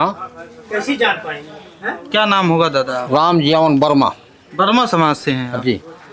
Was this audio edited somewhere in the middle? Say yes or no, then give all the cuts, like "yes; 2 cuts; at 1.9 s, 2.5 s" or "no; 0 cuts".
no; 0 cuts